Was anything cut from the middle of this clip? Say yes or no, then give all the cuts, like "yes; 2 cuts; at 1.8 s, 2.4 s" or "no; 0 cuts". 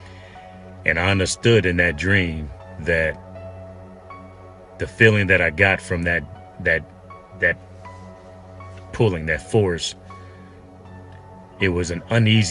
no; 0 cuts